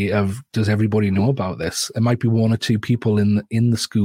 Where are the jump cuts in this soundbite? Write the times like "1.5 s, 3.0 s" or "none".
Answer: none